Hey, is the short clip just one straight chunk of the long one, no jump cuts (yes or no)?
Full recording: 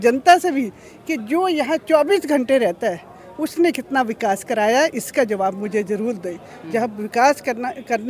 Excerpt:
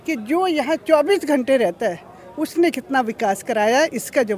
yes